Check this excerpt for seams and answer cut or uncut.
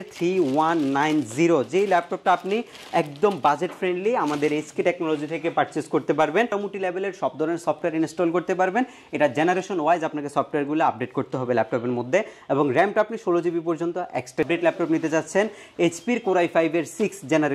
cut